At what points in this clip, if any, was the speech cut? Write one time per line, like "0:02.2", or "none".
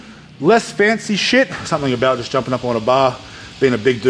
0:01.6